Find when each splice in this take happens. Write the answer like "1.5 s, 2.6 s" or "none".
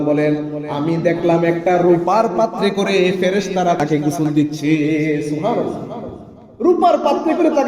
3.8 s